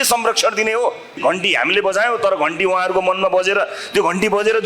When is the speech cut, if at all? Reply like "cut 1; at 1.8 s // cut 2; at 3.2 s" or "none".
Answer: cut 1; at 1.1 s